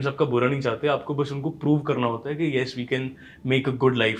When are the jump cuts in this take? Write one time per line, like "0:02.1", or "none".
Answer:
none